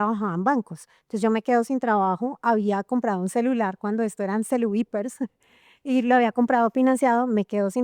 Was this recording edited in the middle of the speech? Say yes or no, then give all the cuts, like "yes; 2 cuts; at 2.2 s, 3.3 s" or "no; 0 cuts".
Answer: no; 0 cuts